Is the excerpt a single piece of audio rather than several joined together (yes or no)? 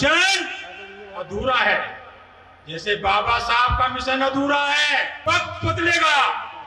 no